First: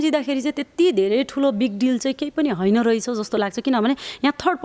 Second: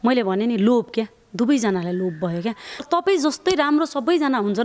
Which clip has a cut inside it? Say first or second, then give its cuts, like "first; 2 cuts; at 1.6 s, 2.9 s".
second; 1 cut; at 2.7 s